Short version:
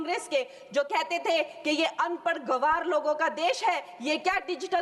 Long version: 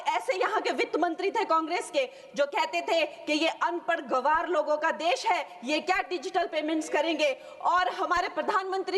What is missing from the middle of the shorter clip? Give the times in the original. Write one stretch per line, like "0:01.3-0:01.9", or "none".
none